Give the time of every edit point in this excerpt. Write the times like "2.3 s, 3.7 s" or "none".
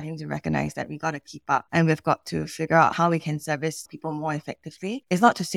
2.9 s